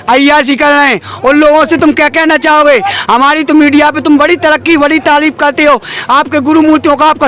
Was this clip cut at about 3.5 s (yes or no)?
no